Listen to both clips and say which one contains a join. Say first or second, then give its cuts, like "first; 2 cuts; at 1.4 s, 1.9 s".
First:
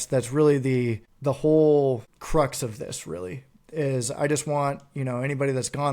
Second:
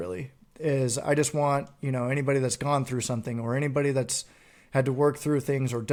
first; 2 cuts; at 1.1 s, 2.1 s